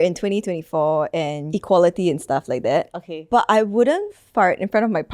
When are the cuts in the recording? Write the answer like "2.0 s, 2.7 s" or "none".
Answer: 1.5 s, 4.2 s

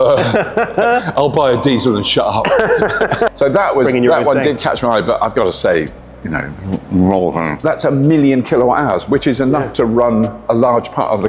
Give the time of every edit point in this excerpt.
3.3 s, 7.6 s

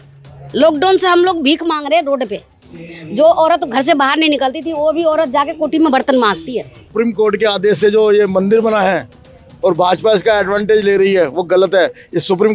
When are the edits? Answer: 6.9 s

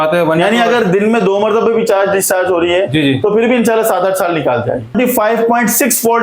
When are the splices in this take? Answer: 4.9 s

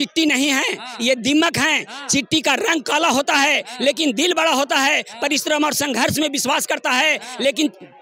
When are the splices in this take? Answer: none

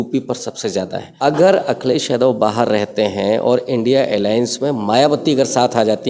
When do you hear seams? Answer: 1.0 s

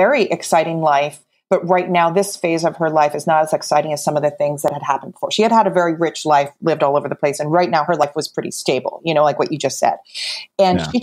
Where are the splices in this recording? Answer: none

